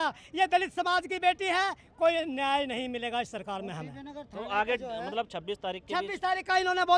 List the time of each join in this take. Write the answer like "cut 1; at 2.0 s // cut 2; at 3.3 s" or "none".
none